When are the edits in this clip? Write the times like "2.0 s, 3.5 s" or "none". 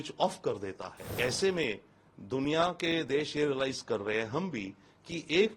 1.1 s